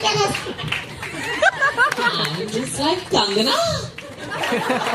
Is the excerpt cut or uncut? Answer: uncut